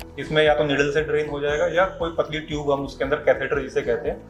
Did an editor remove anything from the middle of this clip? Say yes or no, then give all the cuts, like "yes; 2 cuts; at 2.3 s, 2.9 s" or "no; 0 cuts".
no; 0 cuts